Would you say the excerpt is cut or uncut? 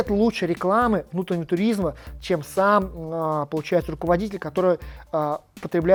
uncut